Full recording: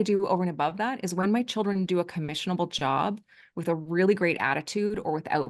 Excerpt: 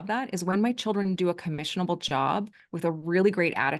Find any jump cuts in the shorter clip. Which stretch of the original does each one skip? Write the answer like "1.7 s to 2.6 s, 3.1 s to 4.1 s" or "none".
3.3 s to 3.5 s